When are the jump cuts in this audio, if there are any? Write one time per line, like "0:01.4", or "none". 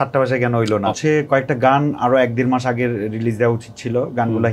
0:01.0